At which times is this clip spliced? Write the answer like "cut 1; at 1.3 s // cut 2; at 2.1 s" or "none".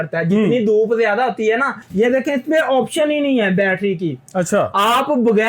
cut 1; at 1.8 s